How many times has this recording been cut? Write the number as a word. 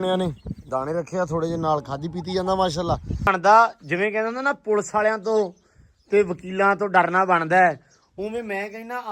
one